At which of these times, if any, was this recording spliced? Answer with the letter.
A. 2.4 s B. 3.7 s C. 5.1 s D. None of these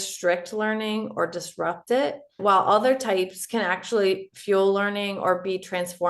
A